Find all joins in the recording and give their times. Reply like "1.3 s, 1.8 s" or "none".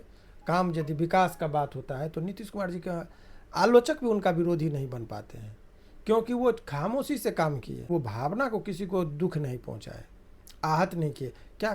7.9 s